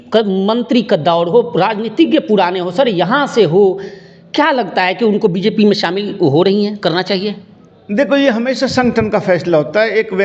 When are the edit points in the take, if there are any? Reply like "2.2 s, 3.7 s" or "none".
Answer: none